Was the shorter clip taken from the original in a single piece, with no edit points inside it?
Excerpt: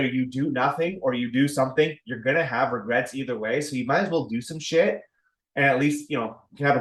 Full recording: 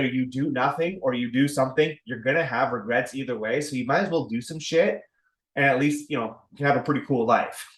yes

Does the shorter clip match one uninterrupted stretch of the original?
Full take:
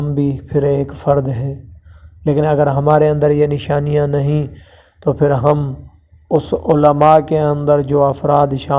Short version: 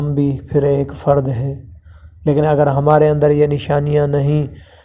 yes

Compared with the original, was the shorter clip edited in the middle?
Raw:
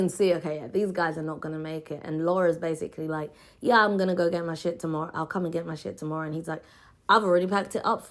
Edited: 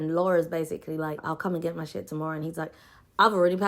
yes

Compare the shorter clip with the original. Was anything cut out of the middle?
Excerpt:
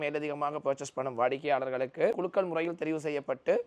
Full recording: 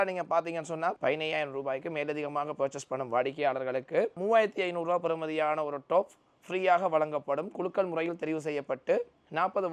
yes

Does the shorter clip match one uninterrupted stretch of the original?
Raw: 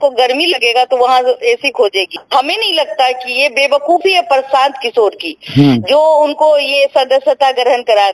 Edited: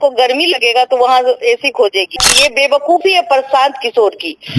no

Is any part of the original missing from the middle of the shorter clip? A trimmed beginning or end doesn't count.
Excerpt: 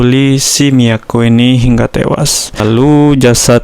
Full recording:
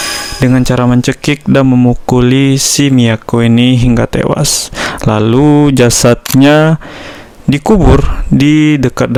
yes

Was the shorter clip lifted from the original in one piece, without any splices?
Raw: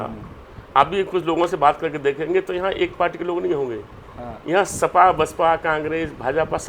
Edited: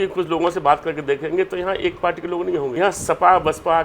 no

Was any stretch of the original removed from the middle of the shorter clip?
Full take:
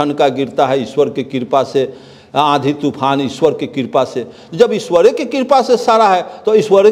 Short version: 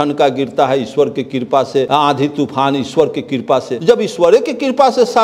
yes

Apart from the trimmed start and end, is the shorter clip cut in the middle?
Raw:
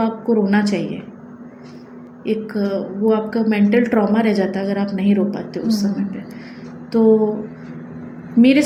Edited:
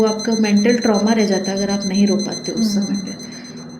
no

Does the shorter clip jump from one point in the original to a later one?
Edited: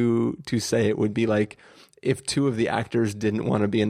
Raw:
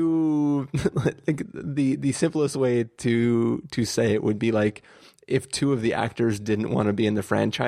no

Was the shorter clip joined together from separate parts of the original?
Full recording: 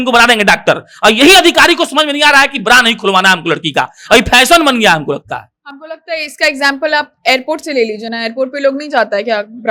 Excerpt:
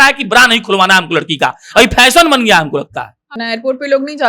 yes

